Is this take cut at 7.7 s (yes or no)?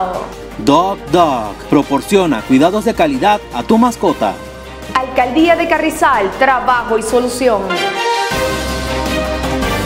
yes